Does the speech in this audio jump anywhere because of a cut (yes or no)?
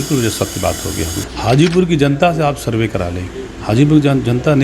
yes